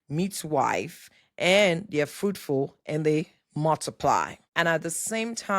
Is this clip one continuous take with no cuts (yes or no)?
no